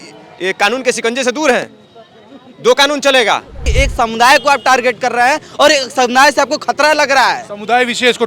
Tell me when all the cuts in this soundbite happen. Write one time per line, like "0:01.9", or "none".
0:03.7